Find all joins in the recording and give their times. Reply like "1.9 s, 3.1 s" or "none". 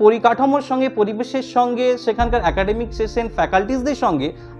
none

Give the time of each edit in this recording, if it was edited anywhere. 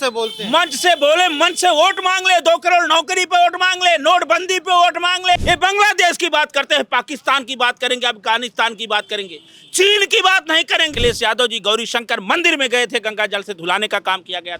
5.4 s, 10.9 s

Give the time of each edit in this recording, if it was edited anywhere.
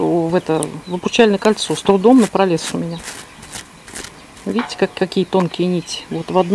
none

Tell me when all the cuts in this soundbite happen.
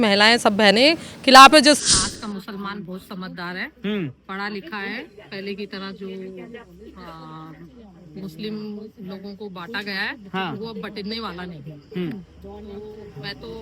1.8 s

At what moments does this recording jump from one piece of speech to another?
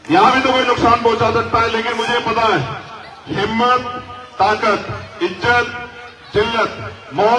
none

